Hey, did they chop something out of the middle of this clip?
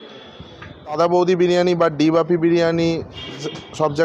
yes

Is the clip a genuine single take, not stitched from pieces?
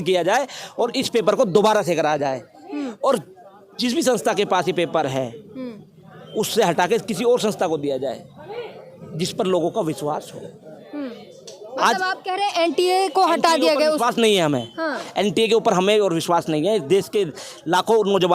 yes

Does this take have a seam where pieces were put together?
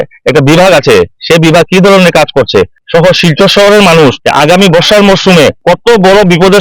yes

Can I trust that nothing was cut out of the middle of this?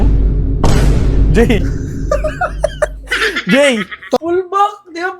no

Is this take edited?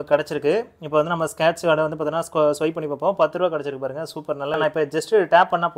yes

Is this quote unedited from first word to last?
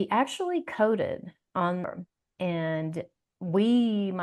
no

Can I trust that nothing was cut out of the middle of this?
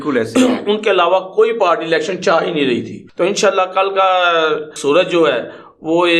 no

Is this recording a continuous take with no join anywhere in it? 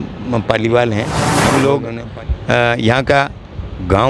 no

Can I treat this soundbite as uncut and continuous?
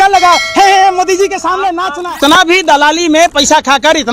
no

